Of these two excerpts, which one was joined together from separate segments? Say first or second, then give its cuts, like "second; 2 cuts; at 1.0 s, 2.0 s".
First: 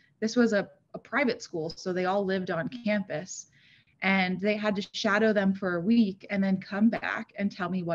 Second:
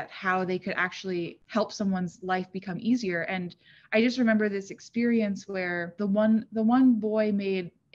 second; 2 cuts; at 1.4 s, 5.9 s